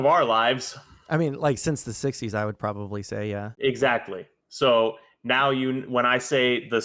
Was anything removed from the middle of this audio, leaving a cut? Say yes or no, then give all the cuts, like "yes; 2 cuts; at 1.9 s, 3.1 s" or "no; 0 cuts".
yes; 1 cut; at 3.5 s